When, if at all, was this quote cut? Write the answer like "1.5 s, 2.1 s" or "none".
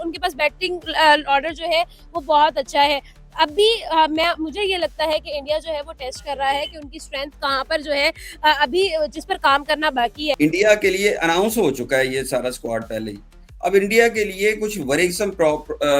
10.4 s